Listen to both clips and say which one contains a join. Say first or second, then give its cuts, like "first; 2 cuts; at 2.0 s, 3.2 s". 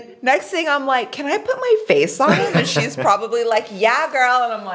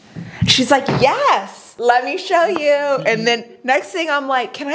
second; 1 cut; at 1.6 s